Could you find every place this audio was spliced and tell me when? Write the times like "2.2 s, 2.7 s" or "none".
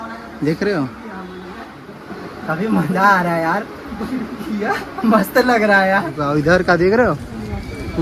2.0 s, 6.2 s

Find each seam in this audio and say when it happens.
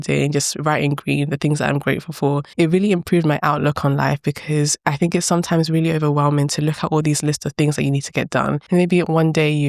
2.5 s, 8.6 s

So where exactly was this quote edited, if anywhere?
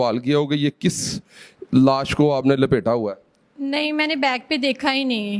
none

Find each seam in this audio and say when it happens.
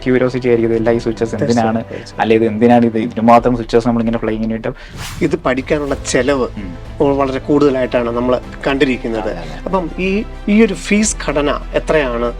5.0 s

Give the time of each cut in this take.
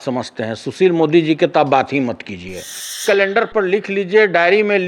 3.0 s

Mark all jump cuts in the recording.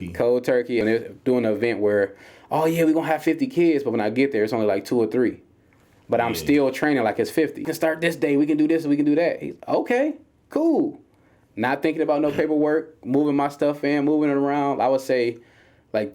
0.8 s, 7.6 s

